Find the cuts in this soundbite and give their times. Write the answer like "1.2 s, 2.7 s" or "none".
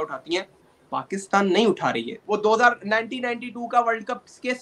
2.1 s